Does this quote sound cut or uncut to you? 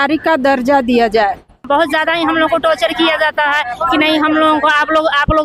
cut